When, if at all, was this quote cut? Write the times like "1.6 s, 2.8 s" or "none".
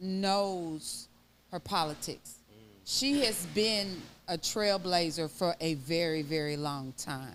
none